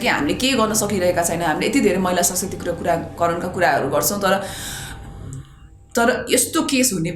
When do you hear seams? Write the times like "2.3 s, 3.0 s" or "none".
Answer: none